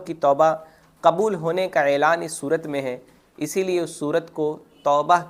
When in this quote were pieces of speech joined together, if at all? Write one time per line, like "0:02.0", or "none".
none